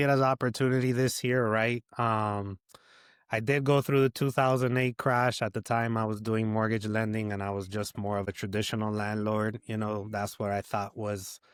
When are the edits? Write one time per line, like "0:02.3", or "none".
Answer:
none

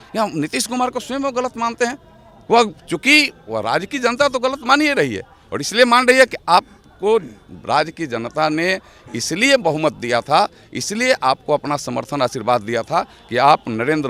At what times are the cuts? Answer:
none

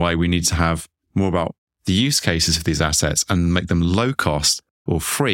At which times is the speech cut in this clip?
0:00.9

